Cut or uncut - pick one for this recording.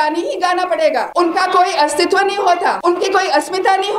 cut